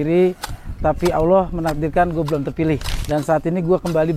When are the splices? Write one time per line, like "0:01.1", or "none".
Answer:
0:02.9

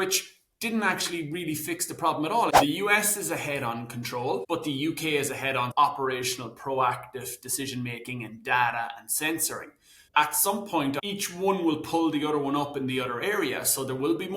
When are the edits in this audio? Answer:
0:02.5
0:04.4
0:11.0

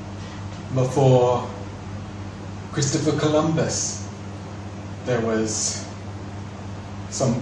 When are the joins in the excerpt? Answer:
0:02.7

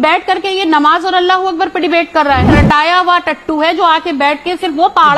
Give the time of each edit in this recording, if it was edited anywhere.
0:02.5

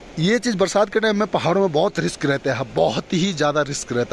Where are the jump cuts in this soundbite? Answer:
none

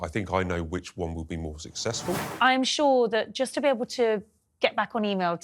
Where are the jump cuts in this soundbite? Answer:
0:02.3

